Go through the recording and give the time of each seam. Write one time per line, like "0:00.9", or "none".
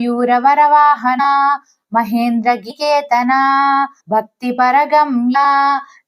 0:01.2
0:02.7
0:04.0
0:05.4